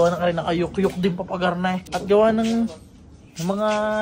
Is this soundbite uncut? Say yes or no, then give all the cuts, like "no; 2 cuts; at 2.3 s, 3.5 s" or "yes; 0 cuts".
no; 1 cut; at 1.9 s